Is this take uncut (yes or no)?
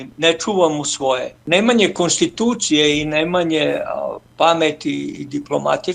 no